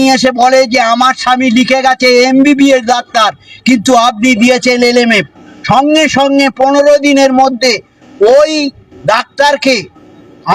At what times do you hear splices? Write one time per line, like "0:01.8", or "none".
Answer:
none